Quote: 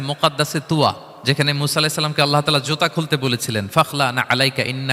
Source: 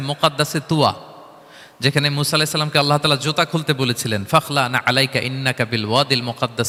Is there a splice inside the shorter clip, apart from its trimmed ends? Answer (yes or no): yes